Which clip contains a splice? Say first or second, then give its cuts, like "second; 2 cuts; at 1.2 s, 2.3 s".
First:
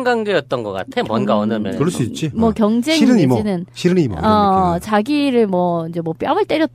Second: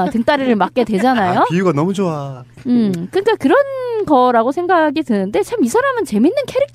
first; 1 cut; at 5.0 s